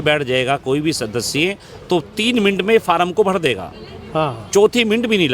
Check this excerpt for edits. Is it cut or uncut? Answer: uncut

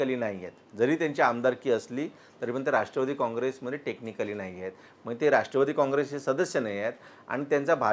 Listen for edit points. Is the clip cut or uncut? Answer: uncut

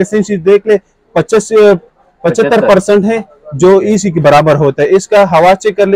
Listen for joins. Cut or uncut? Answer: uncut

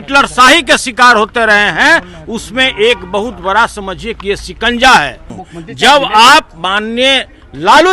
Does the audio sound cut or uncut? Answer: cut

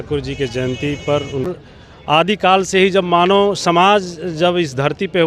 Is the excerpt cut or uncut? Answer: cut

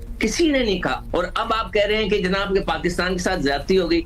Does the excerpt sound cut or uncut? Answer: cut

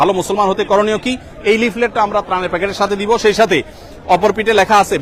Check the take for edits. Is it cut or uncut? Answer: uncut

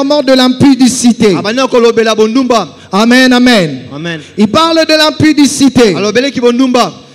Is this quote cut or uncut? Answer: uncut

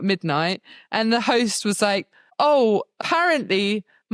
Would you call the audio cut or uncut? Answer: cut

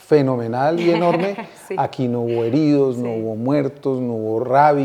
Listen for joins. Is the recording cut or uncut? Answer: uncut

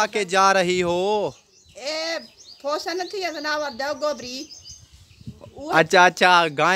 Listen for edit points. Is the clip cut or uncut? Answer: uncut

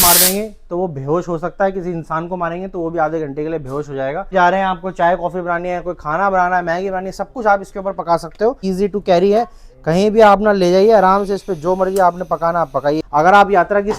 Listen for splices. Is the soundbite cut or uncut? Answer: cut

